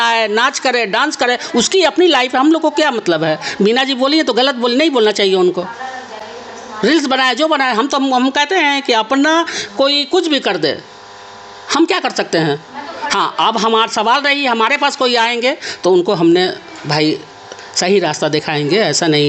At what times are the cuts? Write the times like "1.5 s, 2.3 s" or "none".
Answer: none

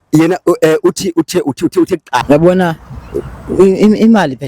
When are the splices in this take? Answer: 2.2 s

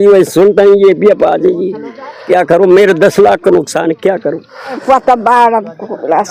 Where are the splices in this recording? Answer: 4.8 s

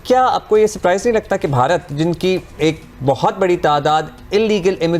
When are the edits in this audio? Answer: none

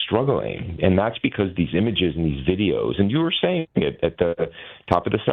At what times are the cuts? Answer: none

